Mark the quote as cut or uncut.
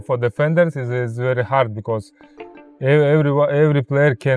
uncut